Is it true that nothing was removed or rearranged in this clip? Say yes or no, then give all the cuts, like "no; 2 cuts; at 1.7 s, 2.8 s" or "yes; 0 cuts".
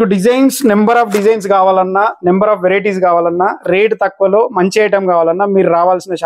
yes; 0 cuts